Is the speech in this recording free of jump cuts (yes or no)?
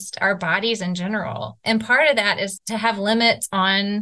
no